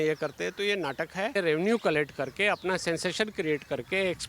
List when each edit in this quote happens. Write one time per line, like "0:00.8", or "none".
0:01.3